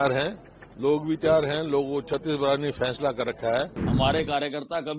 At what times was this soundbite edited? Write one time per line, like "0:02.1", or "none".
0:03.8

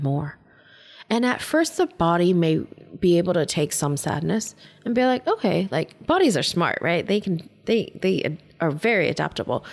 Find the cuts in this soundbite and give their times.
none

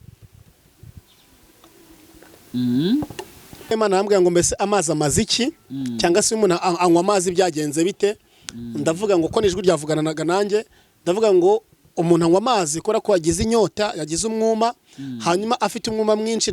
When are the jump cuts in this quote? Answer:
0:03.7

